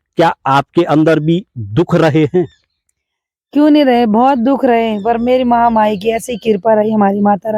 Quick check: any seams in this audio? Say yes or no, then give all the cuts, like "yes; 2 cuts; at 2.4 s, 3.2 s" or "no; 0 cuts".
no; 0 cuts